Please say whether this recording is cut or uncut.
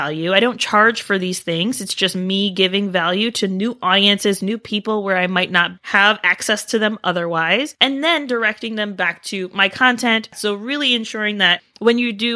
cut